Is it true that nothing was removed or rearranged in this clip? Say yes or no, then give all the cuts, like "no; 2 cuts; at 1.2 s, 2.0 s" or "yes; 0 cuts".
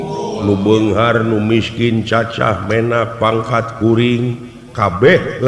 yes; 0 cuts